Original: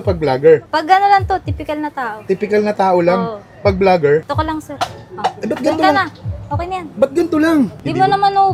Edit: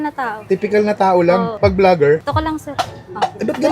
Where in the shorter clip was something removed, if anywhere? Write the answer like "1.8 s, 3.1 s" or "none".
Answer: 1.5 s